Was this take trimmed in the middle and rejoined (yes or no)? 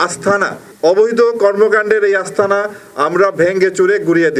no